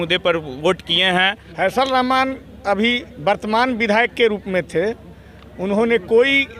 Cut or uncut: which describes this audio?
cut